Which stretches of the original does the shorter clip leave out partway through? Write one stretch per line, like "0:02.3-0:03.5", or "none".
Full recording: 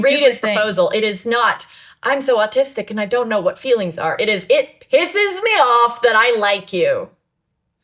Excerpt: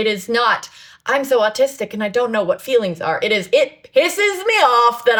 none